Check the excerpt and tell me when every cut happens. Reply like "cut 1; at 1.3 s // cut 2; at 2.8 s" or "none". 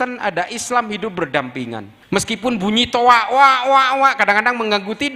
cut 1; at 1.9 s